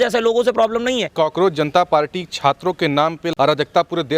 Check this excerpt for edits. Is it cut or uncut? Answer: cut